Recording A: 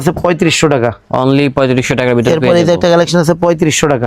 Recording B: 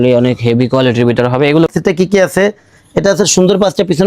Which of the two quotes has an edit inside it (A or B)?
B